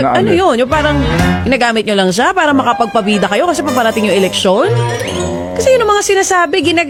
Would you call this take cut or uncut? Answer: uncut